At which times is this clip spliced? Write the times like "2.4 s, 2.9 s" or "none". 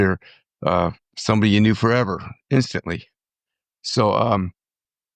none